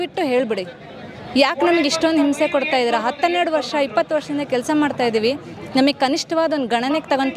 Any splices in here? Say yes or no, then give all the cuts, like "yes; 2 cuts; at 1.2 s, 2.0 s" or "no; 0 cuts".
no; 0 cuts